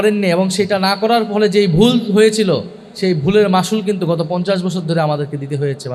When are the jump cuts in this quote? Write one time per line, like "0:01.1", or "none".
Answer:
none